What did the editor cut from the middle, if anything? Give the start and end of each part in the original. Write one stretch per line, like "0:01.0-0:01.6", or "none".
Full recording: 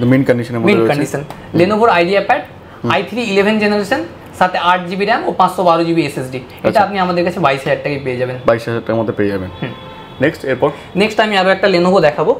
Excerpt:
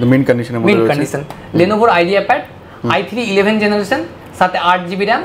none